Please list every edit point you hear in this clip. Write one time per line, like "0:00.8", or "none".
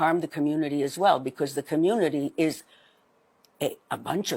none